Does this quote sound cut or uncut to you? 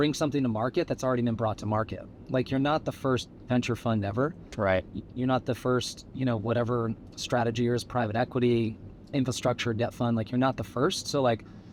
uncut